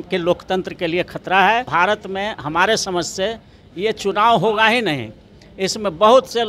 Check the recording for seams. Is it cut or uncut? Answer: cut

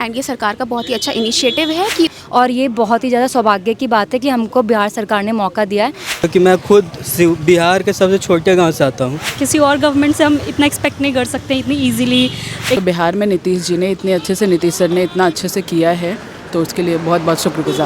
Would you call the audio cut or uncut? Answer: cut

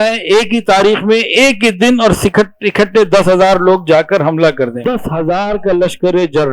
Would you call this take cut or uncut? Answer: cut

